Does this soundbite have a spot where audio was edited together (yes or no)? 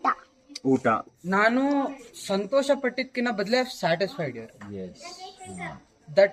yes